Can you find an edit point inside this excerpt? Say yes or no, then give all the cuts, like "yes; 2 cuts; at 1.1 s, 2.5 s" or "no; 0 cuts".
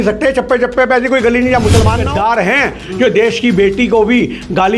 yes; 1 cut; at 2.0 s